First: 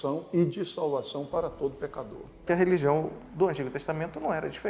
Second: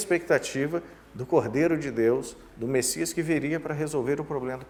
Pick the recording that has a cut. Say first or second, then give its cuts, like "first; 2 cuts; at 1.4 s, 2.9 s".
first; 1 cut; at 2.4 s